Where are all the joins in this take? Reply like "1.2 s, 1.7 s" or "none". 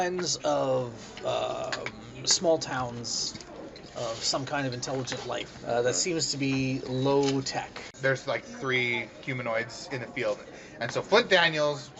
7.9 s